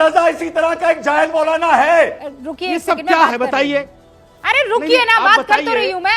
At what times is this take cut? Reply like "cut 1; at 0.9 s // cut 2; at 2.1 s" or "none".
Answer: cut 1; at 2.3 s